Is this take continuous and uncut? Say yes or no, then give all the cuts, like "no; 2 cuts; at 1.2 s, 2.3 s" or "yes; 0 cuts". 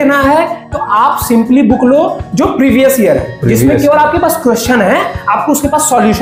yes; 0 cuts